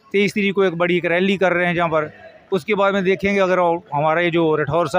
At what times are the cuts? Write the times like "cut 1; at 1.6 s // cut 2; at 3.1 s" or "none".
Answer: none